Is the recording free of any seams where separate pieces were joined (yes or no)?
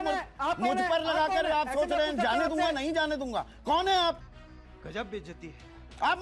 yes